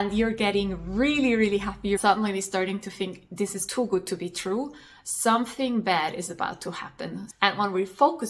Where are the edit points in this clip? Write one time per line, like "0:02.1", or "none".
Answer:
0:02.0
0:07.2